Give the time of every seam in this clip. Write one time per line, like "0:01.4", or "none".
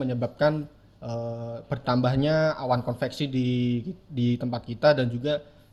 none